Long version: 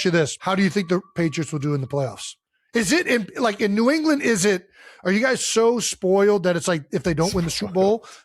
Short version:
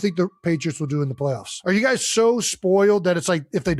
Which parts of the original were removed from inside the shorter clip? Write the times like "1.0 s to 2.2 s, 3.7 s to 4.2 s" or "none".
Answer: 2.2 s to 4.9 s

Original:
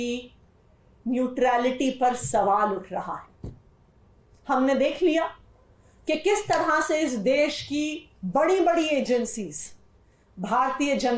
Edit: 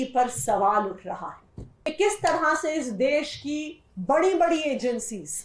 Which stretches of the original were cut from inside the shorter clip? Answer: 3.8 s to 6.2 s

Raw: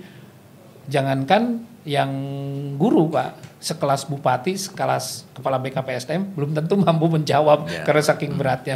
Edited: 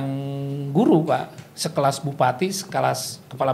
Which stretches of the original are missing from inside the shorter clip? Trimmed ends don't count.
none

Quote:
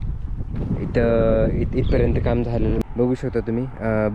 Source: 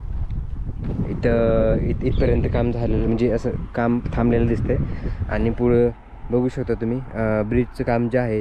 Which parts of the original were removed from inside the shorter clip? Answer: 3.1 s to 6.1 s

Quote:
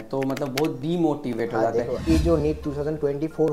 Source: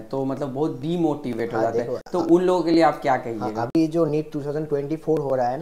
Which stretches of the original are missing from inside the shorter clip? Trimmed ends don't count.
2.0 s to 3.7 s

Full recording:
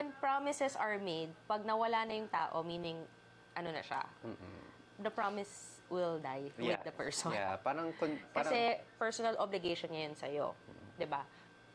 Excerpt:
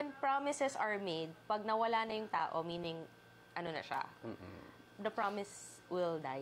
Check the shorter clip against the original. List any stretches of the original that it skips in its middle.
none

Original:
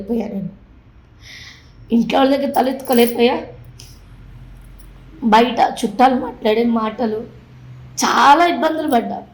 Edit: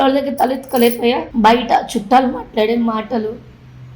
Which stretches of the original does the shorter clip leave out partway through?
3.4 s to 5.1 s

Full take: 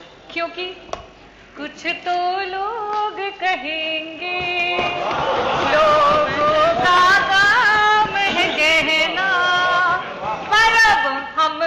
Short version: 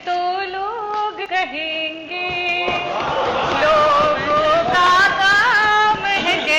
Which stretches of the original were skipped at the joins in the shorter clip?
3.2 s to 3.3 s

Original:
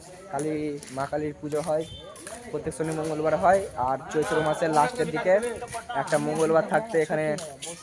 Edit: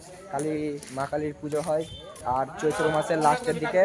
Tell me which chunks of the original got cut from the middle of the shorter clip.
2.2 s to 3.7 s

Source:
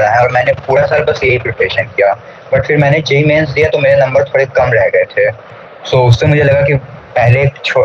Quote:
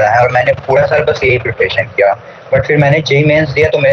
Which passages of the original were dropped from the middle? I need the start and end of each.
none

